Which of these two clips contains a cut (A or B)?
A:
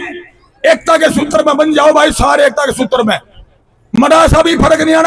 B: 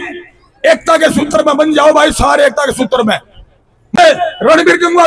B